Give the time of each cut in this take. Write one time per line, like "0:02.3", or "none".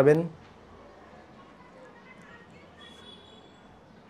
none